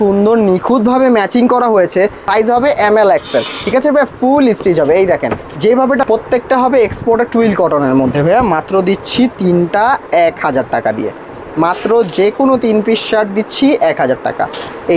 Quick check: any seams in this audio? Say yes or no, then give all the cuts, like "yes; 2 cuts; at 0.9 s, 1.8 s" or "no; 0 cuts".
yes; 2 cuts; at 2.2 s, 6.0 s